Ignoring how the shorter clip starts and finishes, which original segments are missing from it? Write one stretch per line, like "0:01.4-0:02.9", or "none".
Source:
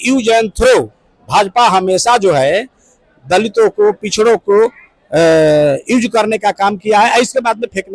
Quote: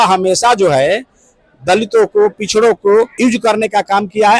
0:04.8-0:05.8